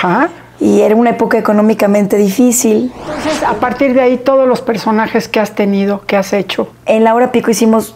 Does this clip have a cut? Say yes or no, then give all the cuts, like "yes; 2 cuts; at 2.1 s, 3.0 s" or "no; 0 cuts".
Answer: yes; 2 cuts; at 3.3 s, 6.7 s